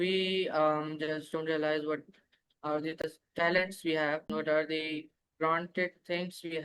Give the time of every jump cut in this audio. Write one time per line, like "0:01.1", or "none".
0:03.0
0:04.4